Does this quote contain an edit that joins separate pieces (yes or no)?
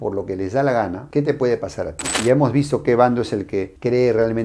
yes